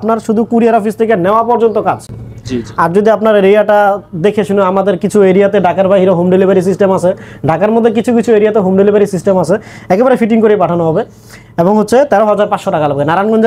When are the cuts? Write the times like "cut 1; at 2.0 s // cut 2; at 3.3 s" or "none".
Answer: none